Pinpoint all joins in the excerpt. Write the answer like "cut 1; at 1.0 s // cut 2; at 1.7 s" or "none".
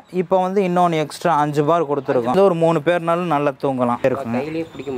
cut 1; at 2.3 s // cut 2; at 4.0 s